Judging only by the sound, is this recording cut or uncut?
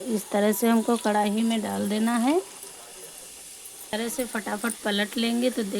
cut